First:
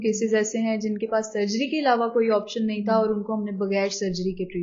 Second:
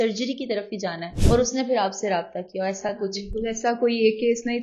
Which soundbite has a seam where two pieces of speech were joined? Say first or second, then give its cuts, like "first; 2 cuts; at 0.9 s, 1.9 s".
second; 1 cut; at 1.1 s